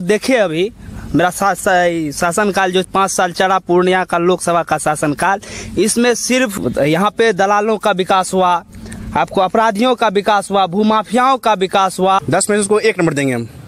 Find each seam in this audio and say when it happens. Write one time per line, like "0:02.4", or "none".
0:06.5
0:12.2